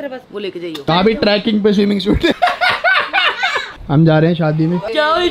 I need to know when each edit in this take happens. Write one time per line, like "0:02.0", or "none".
0:00.9
0:02.4
0:03.8